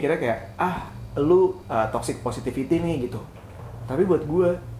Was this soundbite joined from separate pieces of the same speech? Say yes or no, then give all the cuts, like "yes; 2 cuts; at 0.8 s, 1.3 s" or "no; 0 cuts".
yes; 1 cut; at 1.6 s